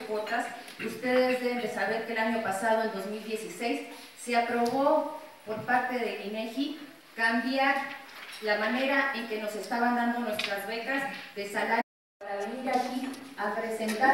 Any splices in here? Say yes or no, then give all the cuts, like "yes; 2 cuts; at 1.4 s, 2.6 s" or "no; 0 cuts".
no; 0 cuts